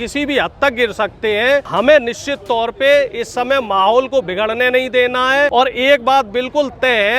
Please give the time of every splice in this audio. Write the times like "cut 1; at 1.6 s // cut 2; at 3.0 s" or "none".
cut 1; at 1.7 s // cut 2; at 5.5 s